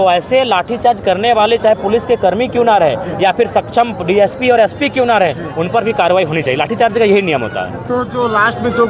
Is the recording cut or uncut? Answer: uncut